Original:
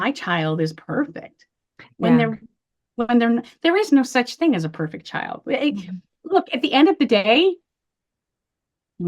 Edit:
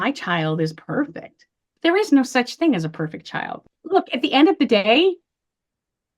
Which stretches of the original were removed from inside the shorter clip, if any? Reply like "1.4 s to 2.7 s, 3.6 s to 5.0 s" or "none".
1.7 s to 3.5 s, 5.3 s to 6.0 s